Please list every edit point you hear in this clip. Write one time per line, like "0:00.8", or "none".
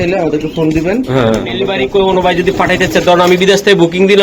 0:01.7